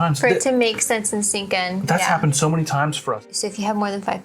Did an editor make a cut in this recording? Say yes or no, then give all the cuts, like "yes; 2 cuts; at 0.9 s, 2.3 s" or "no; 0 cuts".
yes; 1 cut; at 3.2 s